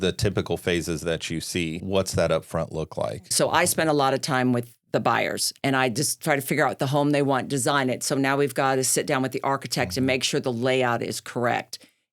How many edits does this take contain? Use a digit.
2